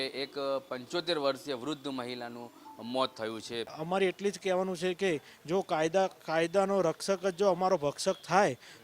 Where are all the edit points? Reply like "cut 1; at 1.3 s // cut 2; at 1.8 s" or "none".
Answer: cut 1; at 3.8 s